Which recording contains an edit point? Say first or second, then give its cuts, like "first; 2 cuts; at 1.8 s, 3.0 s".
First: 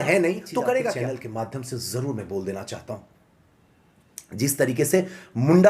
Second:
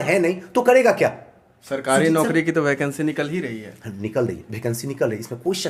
first; 1 cut; at 1.0 s